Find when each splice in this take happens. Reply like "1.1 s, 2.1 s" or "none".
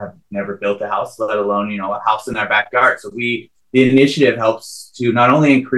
none